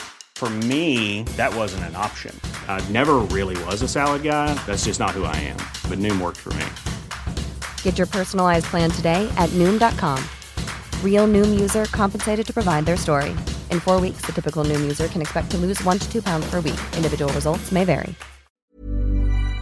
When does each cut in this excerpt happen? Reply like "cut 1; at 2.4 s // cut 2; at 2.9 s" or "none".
cut 1; at 18.7 s